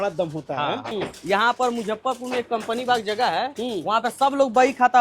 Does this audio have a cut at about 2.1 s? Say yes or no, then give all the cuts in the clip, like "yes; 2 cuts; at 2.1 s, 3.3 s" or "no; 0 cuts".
no; 1 cut; at 0.9 s